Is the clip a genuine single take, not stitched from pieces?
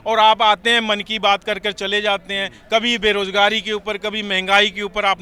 yes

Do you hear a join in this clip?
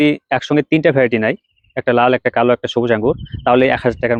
no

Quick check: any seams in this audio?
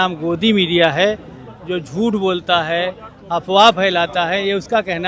no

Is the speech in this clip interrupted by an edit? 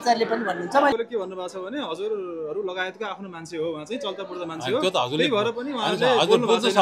yes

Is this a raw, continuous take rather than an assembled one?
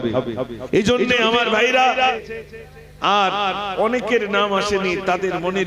no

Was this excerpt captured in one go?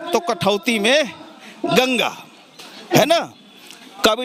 yes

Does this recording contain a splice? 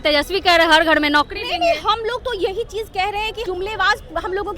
yes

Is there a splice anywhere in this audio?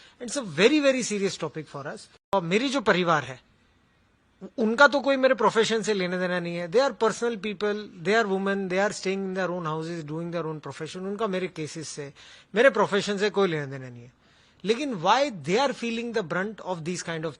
yes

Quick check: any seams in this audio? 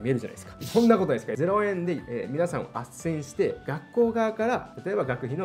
no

